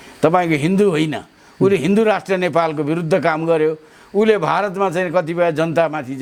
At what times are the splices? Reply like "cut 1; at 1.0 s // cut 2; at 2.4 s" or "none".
none